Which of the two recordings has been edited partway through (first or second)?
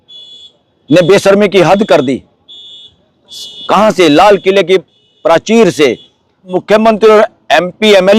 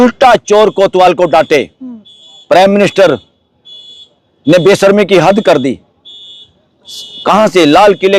first